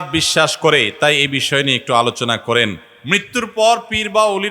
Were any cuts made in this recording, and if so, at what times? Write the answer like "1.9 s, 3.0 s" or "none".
2.8 s